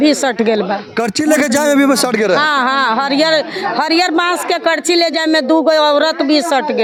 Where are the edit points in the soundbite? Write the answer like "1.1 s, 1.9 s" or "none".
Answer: none